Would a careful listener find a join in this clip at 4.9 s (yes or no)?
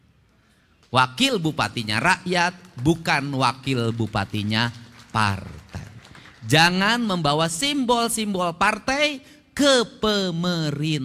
no